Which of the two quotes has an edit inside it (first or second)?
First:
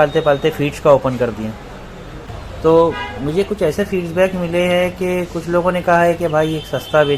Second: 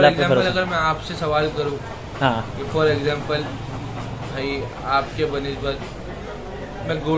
first